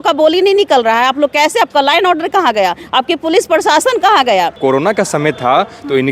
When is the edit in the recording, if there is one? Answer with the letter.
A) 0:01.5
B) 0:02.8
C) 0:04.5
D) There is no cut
C